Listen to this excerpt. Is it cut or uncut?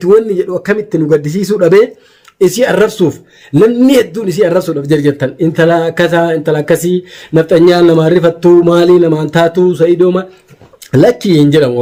uncut